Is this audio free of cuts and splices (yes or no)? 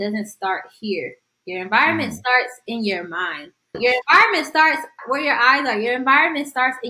no